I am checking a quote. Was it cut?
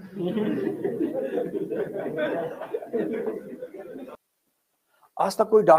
yes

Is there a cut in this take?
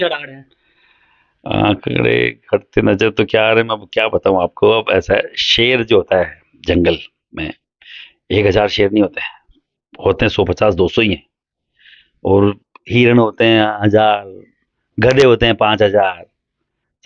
no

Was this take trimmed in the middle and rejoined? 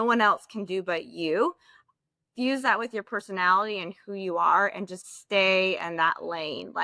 no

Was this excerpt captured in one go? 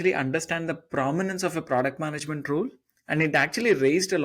yes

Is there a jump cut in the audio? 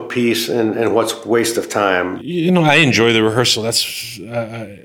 no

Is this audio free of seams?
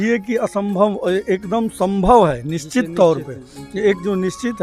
yes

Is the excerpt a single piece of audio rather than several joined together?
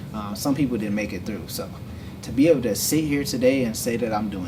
yes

